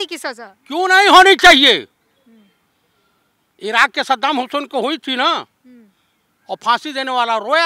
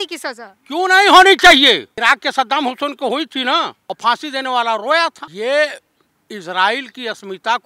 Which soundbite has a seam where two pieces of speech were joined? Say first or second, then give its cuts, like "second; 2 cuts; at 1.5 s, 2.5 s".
second; 3 cuts; at 1.9 s, 3.8 s, 5.2 s